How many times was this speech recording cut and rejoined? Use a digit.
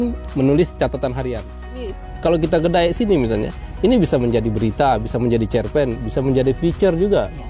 1